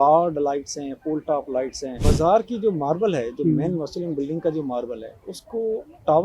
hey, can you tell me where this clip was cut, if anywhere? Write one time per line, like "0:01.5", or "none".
0:01.9